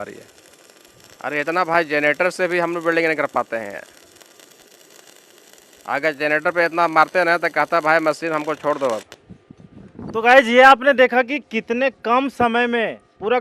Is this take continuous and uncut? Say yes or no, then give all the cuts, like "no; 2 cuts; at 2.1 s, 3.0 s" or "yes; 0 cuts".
yes; 0 cuts